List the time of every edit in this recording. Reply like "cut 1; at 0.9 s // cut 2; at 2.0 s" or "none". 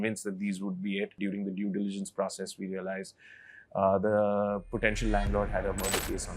cut 1; at 1.2 s